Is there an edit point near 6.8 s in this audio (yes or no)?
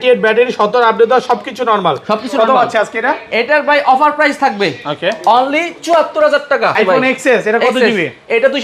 yes